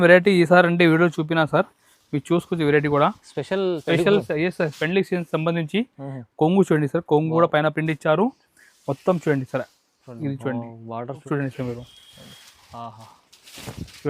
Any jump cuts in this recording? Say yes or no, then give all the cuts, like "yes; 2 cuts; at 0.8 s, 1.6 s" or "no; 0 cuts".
yes; 1 cut; at 11.2 s